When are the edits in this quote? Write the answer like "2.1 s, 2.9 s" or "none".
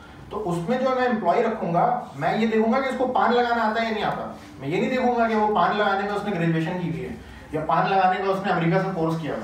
none